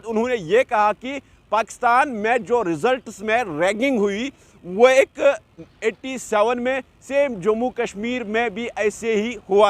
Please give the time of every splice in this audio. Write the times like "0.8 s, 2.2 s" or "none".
none